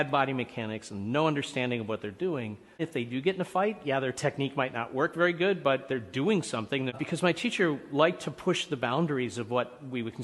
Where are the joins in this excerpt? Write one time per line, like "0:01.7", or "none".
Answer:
0:07.0

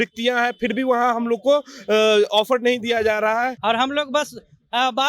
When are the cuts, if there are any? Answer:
0:03.6

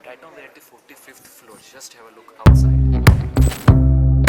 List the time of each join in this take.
0:02.4

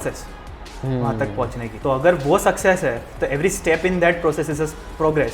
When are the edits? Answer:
0:01.7

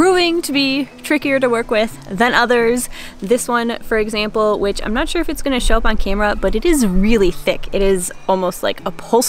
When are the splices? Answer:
none

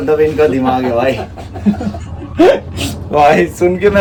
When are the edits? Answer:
none

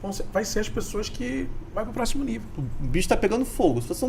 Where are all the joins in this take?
0:02.6

